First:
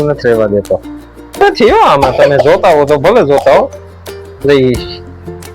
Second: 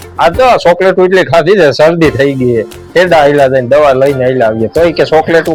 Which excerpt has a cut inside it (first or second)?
first